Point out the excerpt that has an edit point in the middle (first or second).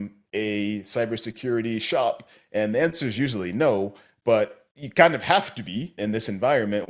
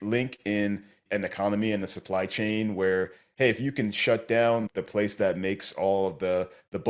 second